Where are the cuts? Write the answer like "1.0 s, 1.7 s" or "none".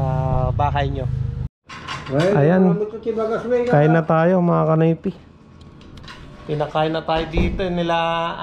1.9 s